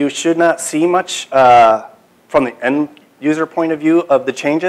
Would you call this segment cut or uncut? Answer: cut